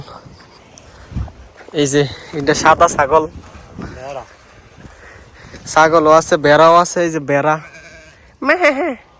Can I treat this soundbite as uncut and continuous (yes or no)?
yes